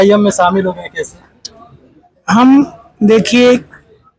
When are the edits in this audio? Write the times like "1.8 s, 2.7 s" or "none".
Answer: 1.6 s